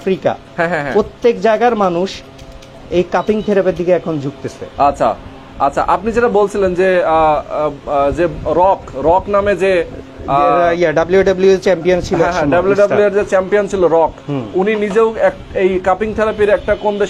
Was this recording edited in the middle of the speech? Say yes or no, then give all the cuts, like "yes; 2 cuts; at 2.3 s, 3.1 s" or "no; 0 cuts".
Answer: no; 0 cuts